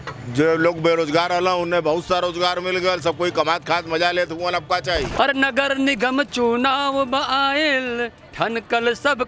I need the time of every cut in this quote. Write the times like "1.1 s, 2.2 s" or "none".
5.1 s